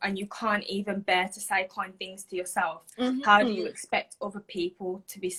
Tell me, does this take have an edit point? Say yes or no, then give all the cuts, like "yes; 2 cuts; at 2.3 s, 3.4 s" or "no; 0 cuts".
no; 0 cuts